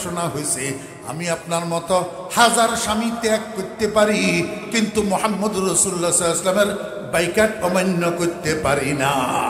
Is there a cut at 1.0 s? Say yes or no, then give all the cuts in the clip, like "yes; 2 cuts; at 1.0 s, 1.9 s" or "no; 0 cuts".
no; 0 cuts